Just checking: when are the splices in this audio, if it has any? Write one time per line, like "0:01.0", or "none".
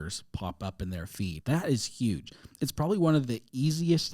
0:01.4